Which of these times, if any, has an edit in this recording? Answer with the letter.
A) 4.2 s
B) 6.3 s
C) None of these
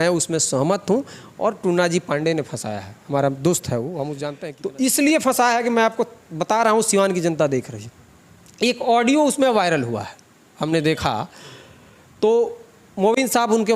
A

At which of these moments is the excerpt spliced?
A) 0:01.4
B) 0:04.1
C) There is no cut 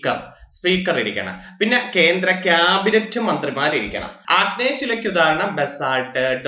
B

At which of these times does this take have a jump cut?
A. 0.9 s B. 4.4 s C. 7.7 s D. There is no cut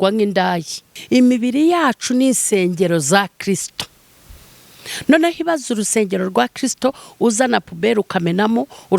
A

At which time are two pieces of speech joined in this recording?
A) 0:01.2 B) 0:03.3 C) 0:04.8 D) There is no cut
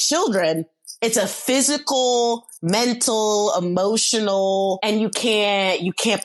C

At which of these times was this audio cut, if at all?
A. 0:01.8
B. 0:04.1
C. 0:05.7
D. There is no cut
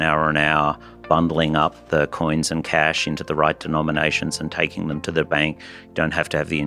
D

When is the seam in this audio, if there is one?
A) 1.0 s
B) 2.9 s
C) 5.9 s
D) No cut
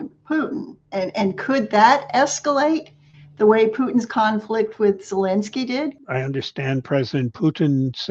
C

